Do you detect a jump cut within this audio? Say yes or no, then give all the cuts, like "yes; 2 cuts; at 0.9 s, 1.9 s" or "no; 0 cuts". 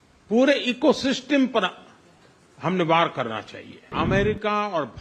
yes; 1 cut; at 3.9 s